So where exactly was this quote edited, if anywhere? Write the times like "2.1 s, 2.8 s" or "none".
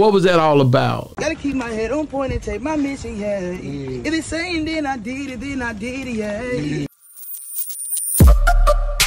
6.9 s

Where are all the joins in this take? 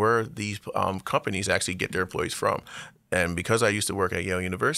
none

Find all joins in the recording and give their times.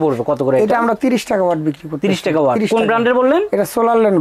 none

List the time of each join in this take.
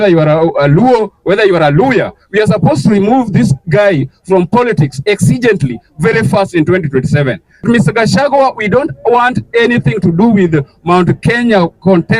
7.6 s

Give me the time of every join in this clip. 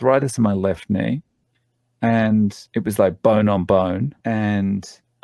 2.7 s, 4.1 s

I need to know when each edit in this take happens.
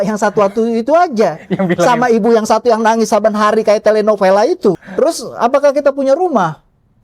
4.8 s

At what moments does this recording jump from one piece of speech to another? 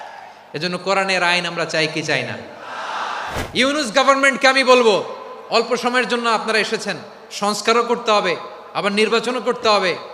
3.4 s

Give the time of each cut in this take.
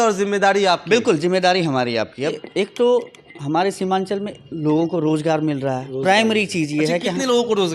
2.3 s

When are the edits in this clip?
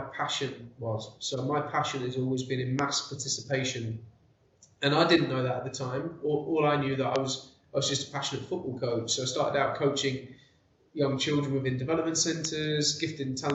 none

